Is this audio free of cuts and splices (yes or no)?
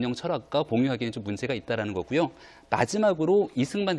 yes